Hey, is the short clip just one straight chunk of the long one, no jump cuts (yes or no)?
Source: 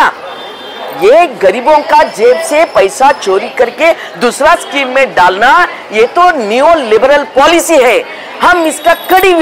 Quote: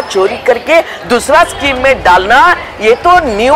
yes